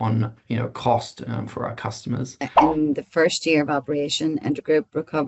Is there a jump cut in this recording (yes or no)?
yes